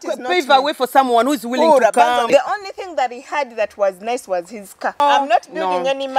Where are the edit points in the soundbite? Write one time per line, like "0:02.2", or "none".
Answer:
0:02.3
0:05.0